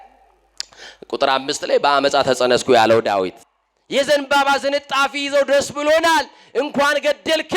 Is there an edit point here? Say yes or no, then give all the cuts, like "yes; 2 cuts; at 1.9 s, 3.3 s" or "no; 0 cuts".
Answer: yes; 1 cut; at 3.4 s